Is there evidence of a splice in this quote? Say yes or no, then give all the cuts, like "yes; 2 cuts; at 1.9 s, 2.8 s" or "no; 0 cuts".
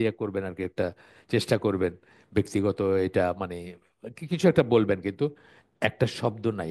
no; 0 cuts